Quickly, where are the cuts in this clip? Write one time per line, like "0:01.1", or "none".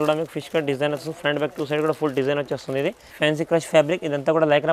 0:03.1